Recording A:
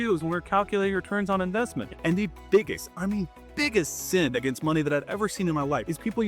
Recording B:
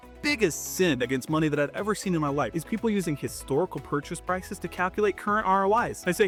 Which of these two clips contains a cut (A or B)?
A